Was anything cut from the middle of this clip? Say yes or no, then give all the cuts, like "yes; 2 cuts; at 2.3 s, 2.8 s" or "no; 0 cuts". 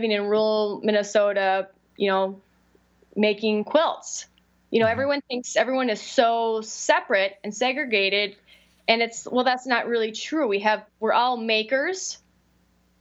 no; 0 cuts